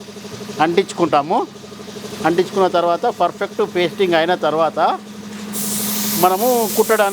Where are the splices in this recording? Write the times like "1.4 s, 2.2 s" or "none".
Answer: none